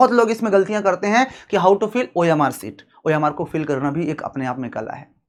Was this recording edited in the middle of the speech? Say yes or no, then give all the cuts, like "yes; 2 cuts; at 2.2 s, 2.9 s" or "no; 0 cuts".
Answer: no; 0 cuts